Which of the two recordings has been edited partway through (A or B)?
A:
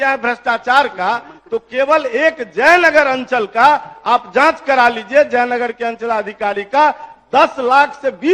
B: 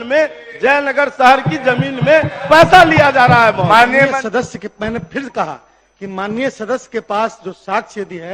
B